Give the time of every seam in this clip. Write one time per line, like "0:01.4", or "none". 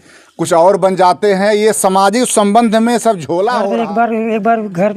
0:03.6